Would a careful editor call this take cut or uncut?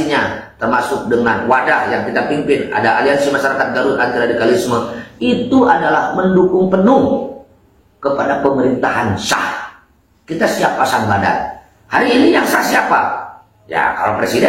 uncut